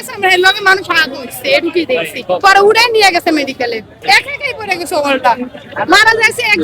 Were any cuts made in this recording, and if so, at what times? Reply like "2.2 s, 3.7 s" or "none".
4.0 s, 5.7 s

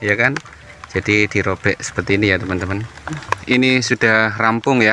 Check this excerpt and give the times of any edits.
3.3 s

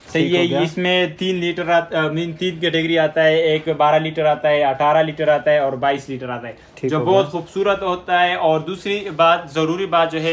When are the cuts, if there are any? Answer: none

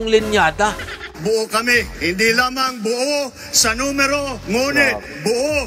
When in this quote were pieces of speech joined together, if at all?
1.1 s

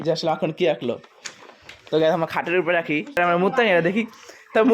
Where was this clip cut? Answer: 3.2 s

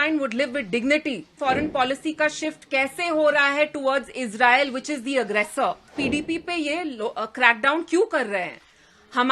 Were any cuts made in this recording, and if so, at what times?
1.4 s, 5.9 s

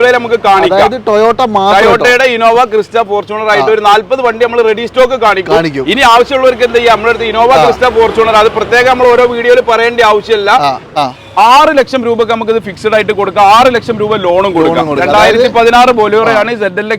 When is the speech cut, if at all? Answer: 10.9 s

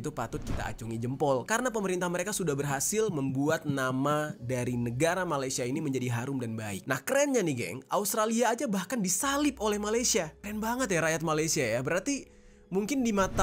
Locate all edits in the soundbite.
6.7 s, 10.4 s

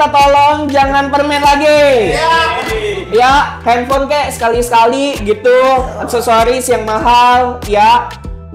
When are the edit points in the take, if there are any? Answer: none

